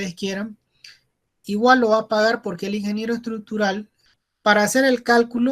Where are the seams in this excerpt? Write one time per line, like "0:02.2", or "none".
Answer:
0:04.0